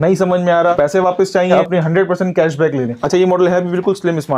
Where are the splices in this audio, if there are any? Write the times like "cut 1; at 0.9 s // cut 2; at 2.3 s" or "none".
cut 1; at 0.7 s // cut 2; at 1.5 s // cut 3; at 3.0 s